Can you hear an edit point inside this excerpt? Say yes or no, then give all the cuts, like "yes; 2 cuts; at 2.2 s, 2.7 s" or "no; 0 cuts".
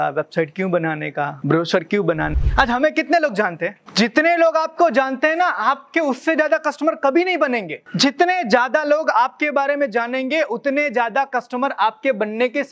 yes; 4 cuts; at 1.4 s, 2.3 s, 3.8 s, 7.8 s